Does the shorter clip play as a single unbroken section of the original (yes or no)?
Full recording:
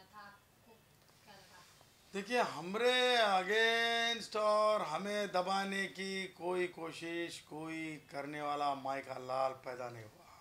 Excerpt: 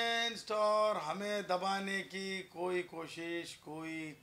yes